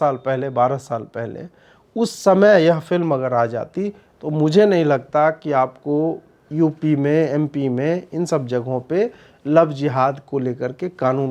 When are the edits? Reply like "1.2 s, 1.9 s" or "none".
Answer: none